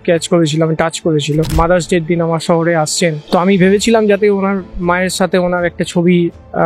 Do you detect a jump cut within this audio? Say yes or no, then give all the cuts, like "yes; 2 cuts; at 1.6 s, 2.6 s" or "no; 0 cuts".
yes; 2 cuts; at 1.5 s, 3.2 s